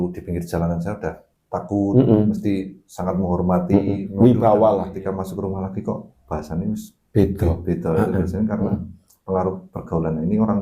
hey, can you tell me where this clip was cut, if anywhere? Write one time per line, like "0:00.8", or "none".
0:04.9

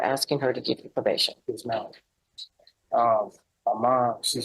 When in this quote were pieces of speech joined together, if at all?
none

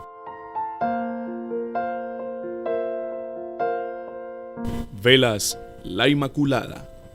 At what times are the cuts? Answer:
none

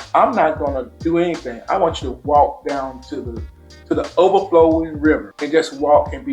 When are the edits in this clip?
none

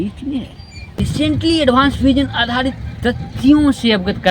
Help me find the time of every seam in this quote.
0:01.0

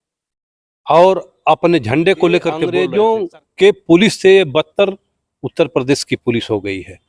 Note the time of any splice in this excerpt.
0:02.6

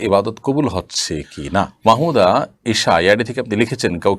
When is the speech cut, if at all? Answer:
0:01.7

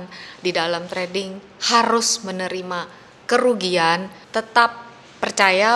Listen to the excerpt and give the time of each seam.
0:04.2

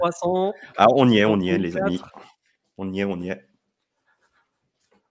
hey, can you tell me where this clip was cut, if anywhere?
none

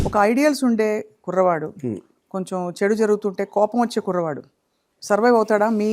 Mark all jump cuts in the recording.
none

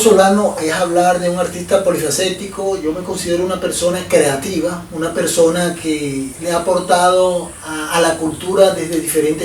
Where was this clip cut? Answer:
none

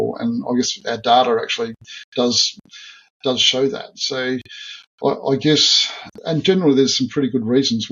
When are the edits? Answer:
0:06.1

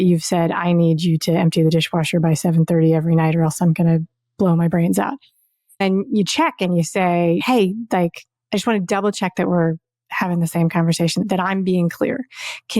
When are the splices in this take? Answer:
0:05.8
0:07.4
0:11.2

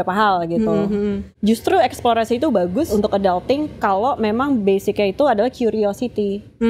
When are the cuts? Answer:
0:01.3
0:02.9

